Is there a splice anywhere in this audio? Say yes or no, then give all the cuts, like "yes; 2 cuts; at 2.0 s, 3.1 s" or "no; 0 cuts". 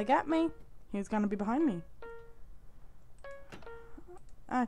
no; 0 cuts